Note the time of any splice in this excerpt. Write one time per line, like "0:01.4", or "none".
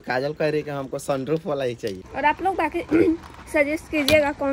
0:02.0